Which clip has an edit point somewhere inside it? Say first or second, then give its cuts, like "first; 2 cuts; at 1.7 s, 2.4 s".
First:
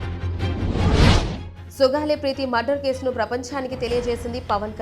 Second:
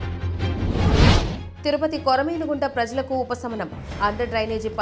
first; 1 cut; at 1.4 s